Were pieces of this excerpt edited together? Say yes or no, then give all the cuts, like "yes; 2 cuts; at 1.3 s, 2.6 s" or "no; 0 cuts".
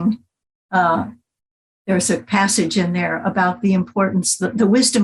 no; 0 cuts